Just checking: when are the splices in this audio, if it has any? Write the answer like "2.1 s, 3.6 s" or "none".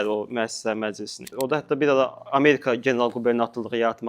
1.3 s